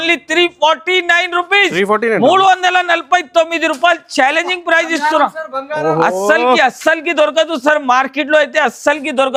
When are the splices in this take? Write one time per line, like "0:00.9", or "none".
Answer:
none

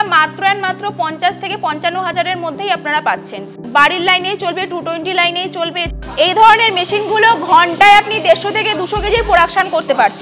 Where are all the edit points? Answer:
0:03.6
0:05.9

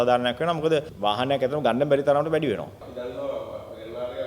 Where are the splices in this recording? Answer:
0:00.9
0:02.8

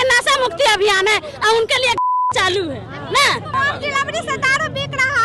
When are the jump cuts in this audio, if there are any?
0:03.5

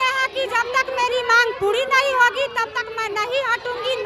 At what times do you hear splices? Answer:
none

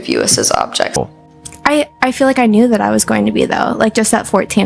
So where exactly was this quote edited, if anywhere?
0:00.9

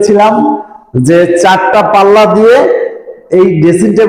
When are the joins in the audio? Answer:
none

